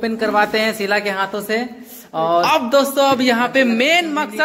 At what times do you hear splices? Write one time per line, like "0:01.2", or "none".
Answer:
0:02.5